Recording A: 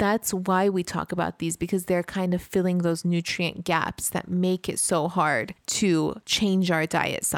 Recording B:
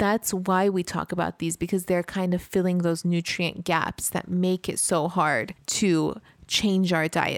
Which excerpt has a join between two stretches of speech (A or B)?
A